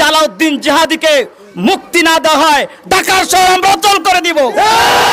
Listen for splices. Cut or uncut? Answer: uncut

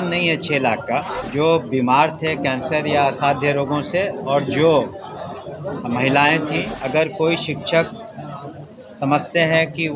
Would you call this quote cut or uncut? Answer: cut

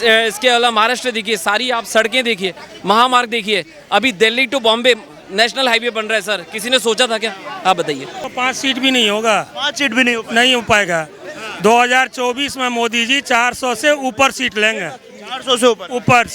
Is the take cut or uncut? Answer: cut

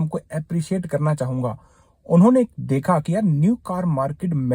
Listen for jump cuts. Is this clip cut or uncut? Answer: uncut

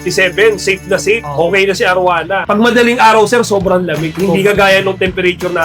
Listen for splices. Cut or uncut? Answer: uncut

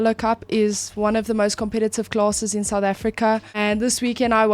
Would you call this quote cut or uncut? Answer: cut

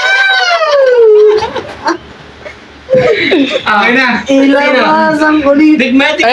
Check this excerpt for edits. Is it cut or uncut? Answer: uncut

